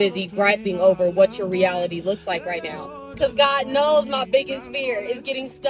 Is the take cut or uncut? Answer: cut